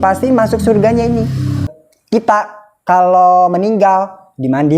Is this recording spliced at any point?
yes; 1 cut; at 1.7 s

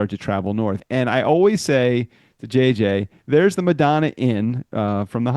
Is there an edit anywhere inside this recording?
yes; 2 cuts; at 0.8 s, 3.2 s

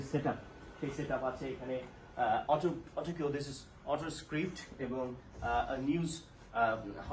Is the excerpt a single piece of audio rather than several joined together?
yes; 0 cuts

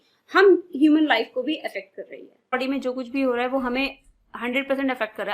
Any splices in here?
yes; 1 cut; at 2.5 s

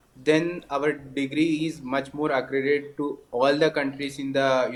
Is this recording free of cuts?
yes; 0 cuts

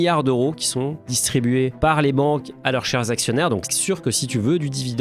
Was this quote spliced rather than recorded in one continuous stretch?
yes; 1 cut; at 3.7 s

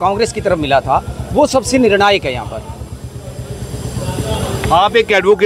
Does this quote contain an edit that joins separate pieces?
no; 0 cuts

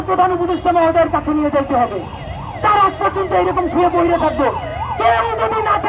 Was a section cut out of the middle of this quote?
no; 0 cuts

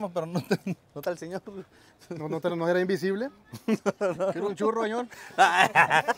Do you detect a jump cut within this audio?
no; 0 cuts

